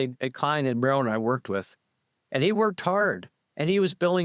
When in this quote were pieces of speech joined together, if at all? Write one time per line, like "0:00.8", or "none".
none